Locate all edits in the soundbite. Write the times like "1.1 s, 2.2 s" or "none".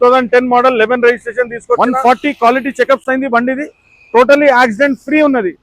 1.8 s

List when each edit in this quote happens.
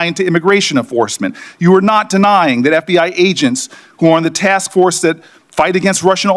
none

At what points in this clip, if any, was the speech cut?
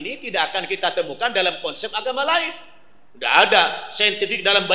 none

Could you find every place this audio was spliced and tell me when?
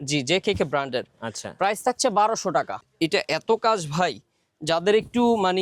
2.8 s

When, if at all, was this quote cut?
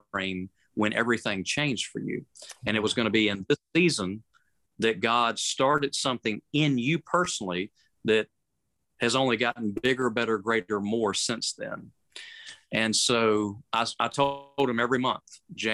none

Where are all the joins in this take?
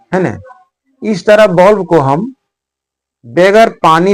none

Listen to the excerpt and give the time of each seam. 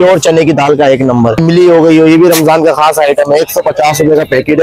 1.4 s

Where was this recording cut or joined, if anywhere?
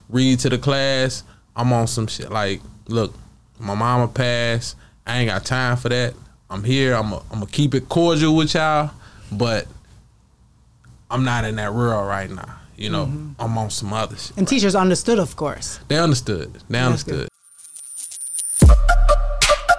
17.3 s

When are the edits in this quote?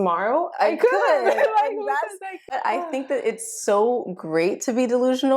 2.5 s

